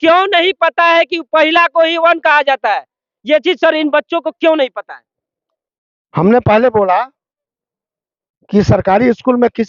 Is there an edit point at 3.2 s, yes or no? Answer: no